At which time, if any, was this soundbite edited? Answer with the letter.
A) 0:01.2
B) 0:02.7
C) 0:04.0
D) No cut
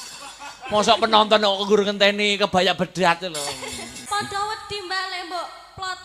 C